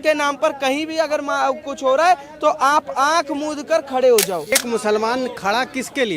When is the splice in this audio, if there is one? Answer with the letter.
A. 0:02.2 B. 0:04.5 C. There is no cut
B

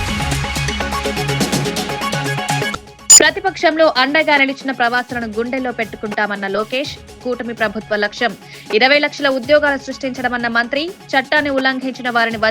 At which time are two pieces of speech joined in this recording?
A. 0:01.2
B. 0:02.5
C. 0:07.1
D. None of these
B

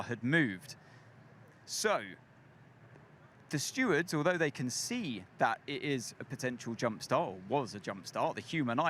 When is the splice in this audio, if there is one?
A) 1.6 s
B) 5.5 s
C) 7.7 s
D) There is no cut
C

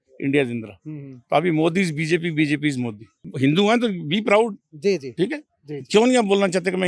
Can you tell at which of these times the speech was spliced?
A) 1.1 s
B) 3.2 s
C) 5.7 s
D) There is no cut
B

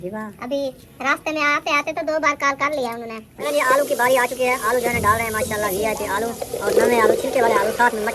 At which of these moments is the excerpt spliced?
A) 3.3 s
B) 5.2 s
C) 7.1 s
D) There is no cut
A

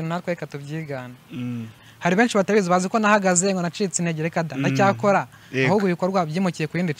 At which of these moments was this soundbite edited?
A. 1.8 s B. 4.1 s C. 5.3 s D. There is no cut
A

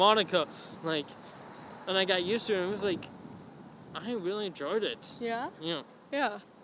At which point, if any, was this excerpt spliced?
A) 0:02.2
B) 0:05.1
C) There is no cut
C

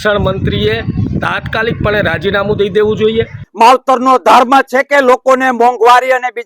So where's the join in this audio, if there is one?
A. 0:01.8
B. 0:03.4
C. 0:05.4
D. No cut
B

